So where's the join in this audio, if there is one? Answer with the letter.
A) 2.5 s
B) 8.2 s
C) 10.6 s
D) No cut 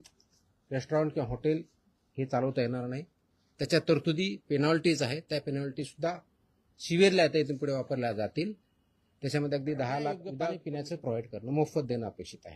C